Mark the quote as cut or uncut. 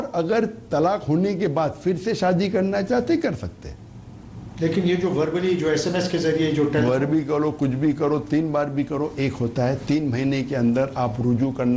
uncut